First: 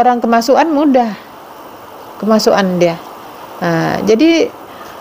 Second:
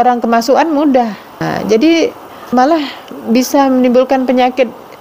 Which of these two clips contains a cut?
second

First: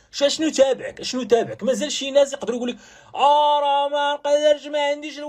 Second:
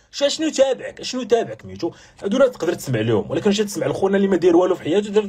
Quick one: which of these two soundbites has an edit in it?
second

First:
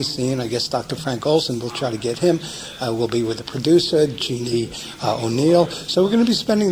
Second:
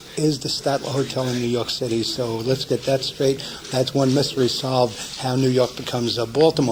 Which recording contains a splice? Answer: first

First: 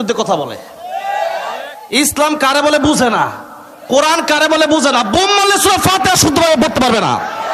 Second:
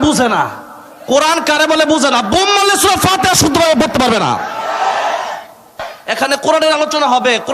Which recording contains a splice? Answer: second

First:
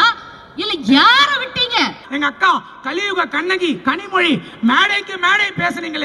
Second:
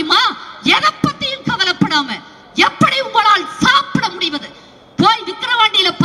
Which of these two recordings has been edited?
first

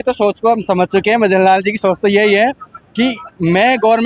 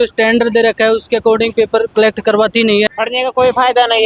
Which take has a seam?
second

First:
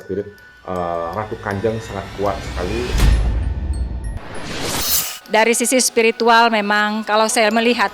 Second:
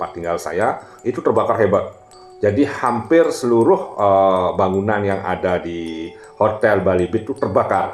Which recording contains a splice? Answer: first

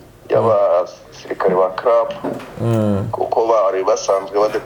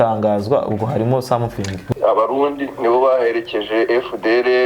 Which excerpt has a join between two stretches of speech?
second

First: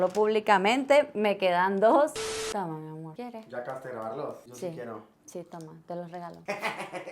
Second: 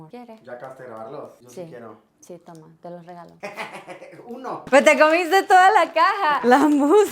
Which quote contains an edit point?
first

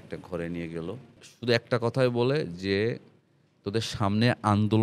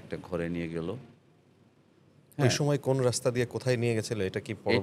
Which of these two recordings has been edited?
first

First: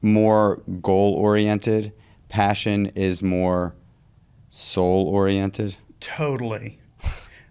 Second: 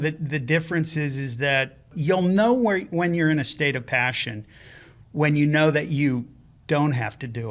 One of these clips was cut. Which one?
second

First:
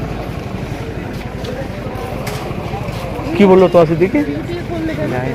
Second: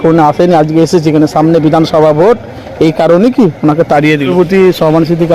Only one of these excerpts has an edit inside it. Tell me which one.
second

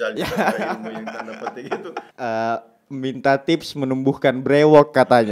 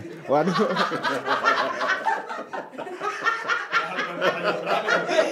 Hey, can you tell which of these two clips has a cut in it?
first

